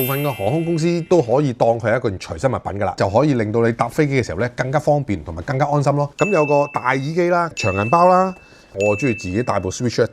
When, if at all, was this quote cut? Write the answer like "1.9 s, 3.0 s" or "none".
3.0 s, 6.1 s, 8.8 s

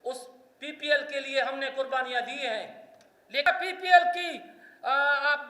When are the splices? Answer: 3.5 s

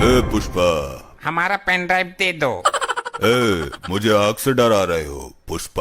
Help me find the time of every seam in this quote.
1.1 s

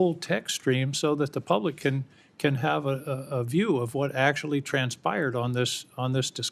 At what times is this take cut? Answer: none

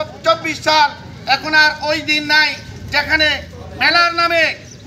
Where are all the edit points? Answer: none

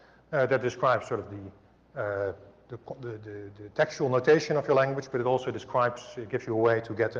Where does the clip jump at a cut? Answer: 2.5 s

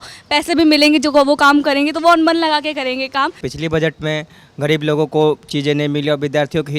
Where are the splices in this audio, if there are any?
3.4 s

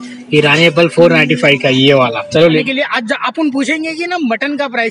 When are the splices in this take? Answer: 2.5 s

